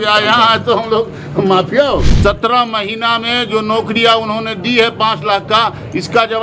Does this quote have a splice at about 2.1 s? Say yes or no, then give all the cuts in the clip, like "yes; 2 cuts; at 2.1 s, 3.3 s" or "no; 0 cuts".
yes; 1 cut; at 2.1 s